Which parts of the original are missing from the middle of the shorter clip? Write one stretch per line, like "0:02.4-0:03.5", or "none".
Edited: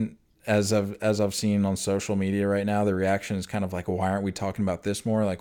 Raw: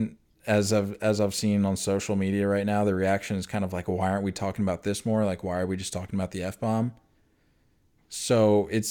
none